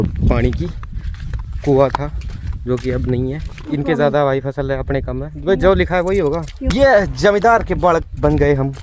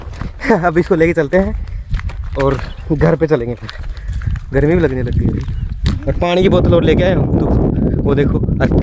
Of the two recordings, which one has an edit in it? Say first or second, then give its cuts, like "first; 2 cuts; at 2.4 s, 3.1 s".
first; 2 cuts; at 3.6 s, 6.6 s